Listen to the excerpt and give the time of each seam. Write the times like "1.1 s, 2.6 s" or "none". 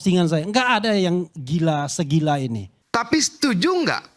2.8 s